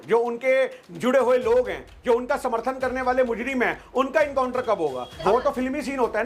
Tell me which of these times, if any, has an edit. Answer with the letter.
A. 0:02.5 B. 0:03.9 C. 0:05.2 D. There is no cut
C